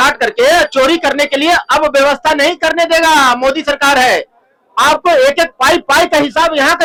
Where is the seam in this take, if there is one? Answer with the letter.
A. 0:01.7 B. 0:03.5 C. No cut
C